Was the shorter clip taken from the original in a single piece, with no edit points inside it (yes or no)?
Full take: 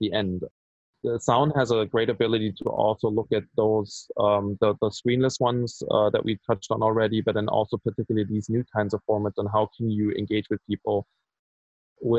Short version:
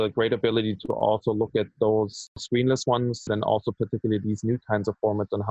no